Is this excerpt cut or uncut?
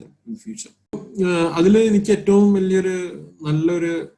cut